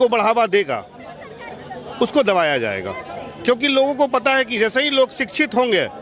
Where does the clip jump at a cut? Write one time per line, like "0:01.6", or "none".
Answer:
none